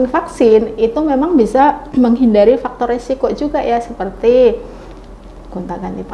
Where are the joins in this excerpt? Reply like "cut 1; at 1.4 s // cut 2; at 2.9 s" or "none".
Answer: none